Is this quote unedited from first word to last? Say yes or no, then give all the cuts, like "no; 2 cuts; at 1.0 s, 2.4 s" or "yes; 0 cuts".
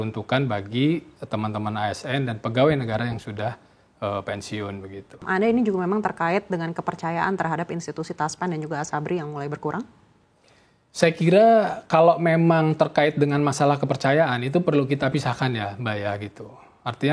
no; 1 cut; at 5.2 s